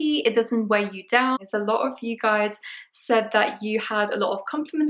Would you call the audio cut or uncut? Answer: cut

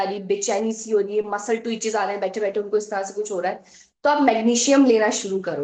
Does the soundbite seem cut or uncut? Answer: uncut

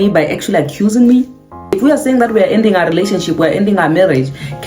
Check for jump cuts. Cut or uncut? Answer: cut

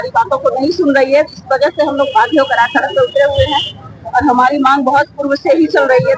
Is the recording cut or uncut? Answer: uncut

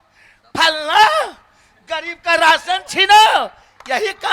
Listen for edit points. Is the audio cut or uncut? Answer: uncut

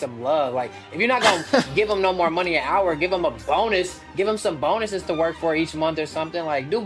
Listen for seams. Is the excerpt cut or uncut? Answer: uncut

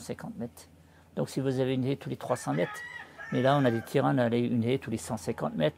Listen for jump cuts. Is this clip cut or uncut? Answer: uncut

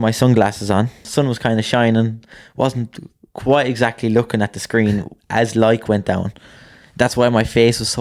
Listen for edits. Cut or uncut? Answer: cut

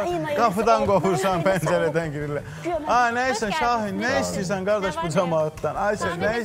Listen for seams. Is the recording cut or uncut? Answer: uncut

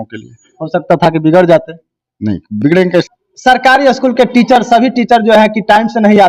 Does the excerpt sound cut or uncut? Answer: cut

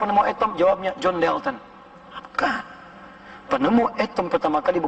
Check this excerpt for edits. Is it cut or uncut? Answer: uncut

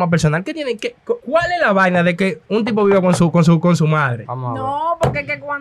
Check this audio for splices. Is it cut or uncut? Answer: cut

